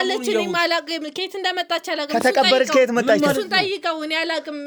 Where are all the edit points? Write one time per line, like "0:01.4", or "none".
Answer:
none